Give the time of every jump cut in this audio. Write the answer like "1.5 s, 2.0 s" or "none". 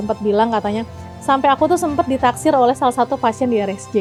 none